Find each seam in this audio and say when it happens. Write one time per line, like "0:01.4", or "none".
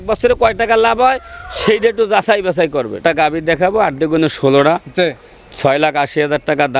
0:02.9